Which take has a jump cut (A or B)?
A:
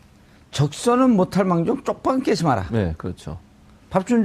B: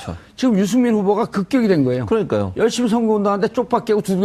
A